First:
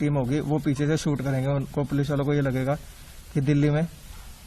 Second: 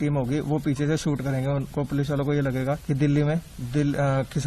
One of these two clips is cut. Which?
second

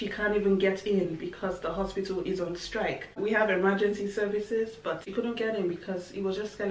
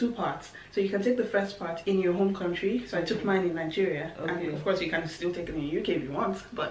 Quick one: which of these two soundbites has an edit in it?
first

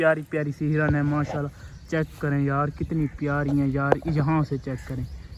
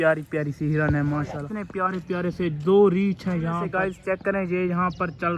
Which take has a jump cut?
second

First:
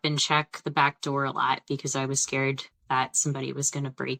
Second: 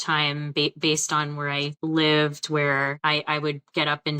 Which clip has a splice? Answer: second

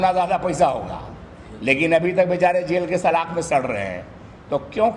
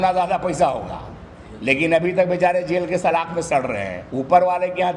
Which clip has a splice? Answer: second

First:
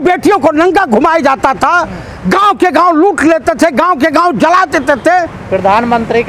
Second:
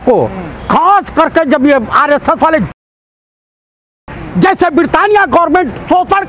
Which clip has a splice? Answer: first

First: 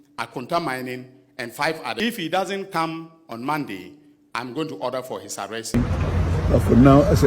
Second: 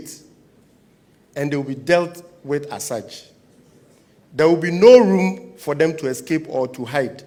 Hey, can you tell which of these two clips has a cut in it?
first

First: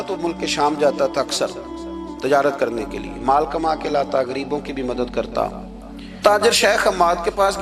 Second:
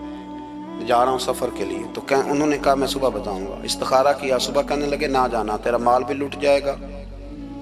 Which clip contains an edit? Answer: first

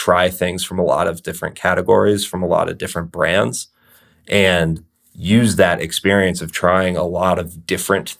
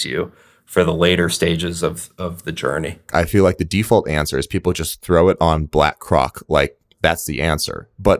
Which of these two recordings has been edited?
second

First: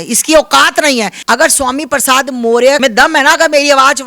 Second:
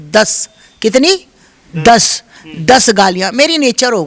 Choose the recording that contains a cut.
first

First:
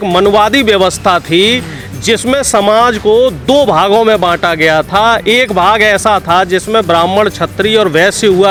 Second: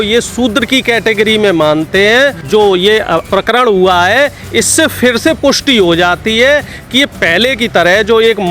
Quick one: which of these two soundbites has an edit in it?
second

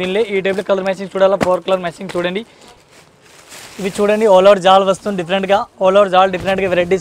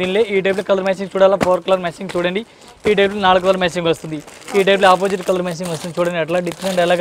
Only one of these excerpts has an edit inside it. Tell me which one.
first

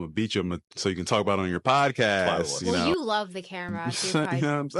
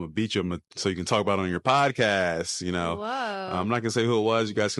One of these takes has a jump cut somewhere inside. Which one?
first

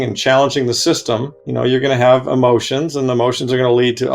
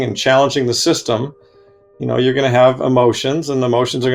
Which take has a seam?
first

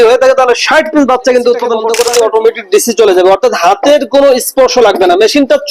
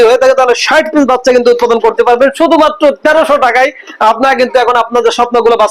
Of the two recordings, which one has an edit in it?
first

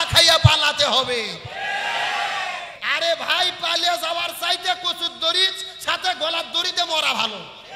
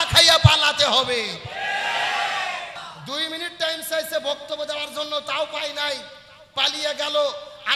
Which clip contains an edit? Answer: second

